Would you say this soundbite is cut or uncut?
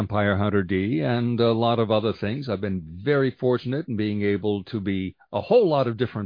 uncut